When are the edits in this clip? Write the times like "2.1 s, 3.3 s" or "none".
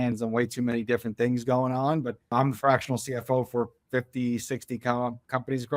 2.3 s